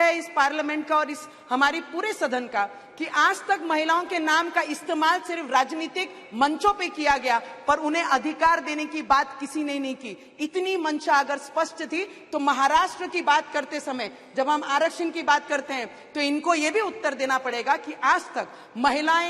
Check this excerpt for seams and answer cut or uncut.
uncut